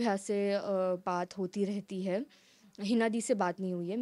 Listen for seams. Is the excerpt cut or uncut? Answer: uncut